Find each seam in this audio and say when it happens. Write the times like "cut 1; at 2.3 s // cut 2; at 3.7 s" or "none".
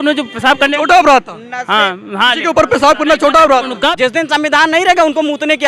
cut 1; at 3.8 s